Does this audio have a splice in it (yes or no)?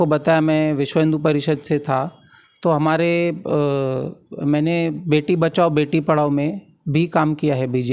no